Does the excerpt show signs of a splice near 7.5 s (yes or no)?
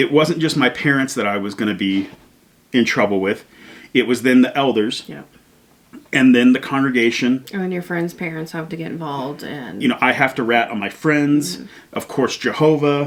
no